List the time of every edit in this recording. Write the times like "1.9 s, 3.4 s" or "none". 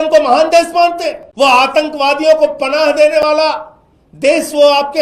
1.2 s